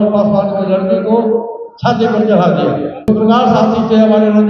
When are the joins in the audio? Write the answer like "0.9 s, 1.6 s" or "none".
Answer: 3.1 s